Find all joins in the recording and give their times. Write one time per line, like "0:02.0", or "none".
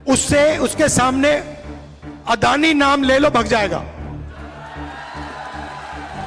none